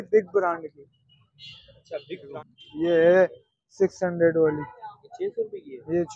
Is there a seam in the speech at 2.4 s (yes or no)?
yes